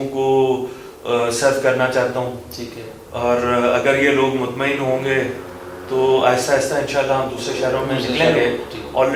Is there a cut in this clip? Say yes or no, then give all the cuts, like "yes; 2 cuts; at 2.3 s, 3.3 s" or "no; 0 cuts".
no; 0 cuts